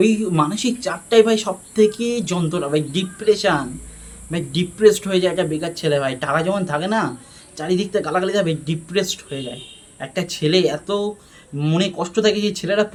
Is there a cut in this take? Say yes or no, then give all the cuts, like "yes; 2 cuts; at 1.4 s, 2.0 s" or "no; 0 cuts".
no; 0 cuts